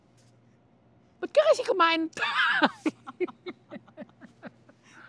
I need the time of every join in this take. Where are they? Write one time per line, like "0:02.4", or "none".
none